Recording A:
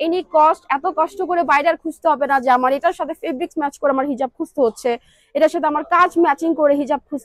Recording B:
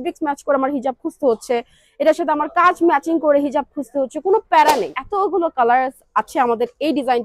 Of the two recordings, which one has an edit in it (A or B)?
B